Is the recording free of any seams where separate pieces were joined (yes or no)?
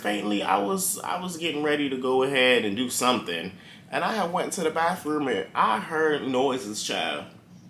yes